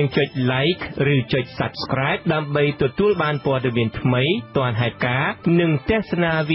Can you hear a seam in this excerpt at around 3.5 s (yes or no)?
no